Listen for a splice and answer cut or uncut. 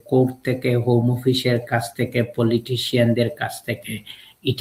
uncut